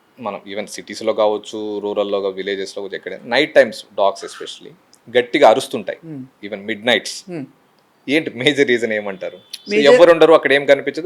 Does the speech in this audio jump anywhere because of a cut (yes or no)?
no